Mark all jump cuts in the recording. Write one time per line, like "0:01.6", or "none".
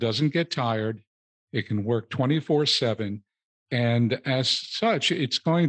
none

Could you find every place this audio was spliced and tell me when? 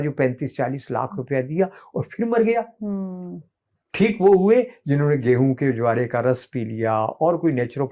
none

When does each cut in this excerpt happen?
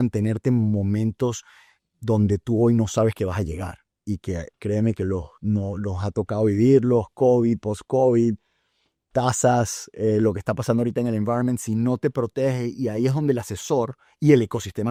none

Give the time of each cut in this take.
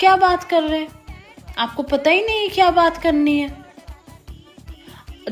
none

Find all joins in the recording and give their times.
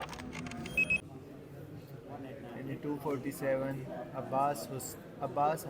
0:01.0

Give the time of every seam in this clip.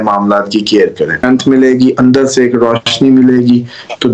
0:01.2

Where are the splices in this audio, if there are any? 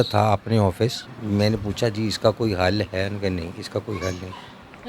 0:01.1

